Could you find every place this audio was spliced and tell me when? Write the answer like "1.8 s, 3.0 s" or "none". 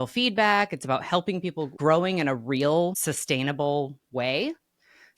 1.8 s